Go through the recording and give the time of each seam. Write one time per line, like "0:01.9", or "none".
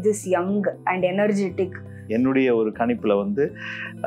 0:02.0